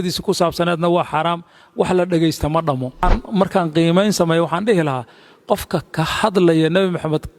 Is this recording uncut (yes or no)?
no